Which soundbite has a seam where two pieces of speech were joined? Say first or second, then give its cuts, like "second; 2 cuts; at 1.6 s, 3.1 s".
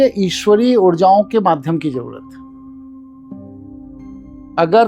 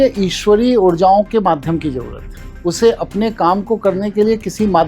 second; 1 cut; at 2.6 s